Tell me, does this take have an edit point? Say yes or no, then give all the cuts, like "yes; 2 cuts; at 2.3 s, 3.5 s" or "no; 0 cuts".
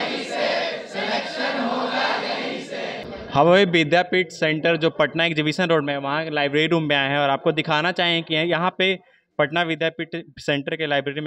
no; 0 cuts